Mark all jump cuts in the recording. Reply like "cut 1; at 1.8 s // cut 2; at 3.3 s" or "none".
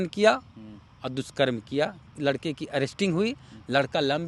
cut 1; at 2.1 s